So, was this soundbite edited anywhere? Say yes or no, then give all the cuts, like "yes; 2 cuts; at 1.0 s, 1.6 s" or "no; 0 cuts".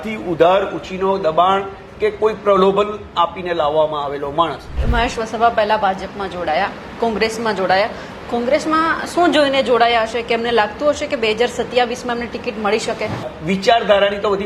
yes; 2 cuts; at 4.8 s, 13.3 s